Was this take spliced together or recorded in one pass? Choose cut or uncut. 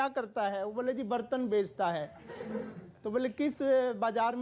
uncut